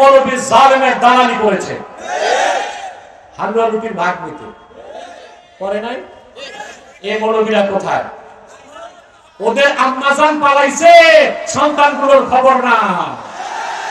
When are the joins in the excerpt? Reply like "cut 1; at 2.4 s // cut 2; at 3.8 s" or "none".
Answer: none